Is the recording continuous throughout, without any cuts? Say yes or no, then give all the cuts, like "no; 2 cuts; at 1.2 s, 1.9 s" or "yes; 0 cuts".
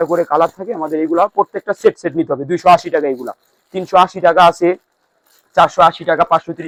yes; 0 cuts